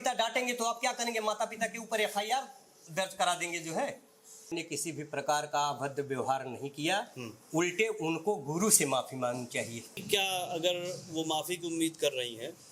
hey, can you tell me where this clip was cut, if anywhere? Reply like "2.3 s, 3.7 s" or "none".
4.5 s, 10.0 s

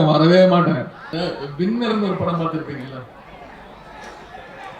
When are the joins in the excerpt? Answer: 1.0 s

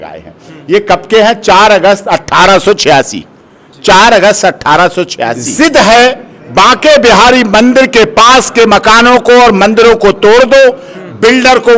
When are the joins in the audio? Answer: 5.4 s

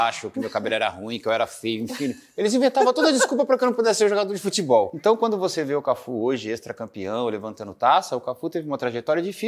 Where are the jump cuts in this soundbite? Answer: 4.9 s

